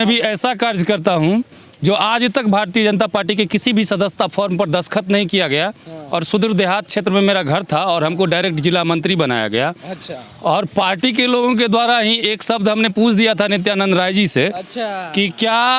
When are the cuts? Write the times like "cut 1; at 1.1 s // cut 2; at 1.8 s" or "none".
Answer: none